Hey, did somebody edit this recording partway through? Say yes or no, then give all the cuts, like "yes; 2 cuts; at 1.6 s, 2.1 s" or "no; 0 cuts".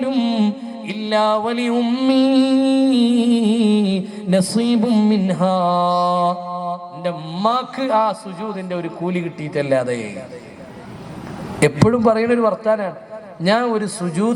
no; 0 cuts